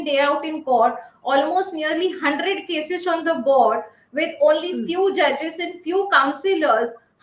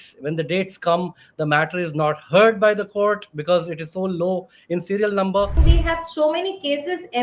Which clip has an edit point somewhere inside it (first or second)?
second